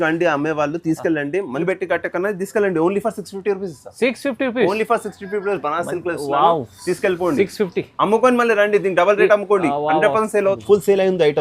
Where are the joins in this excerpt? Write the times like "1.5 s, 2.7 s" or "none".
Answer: 1.6 s, 10.6 s